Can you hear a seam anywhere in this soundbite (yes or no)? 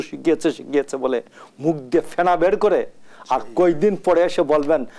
no